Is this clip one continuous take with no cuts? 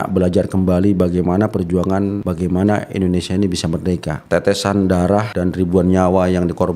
no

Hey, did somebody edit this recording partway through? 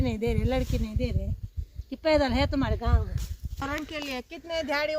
yes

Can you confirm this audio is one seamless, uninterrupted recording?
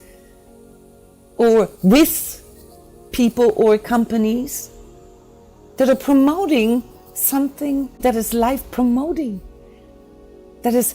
no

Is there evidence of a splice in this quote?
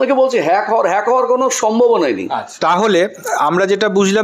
yes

